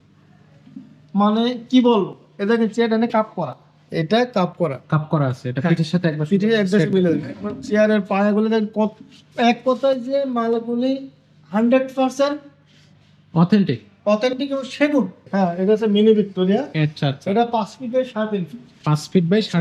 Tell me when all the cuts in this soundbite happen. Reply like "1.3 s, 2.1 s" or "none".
15.2 s